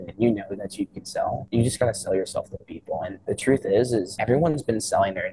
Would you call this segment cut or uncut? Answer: cut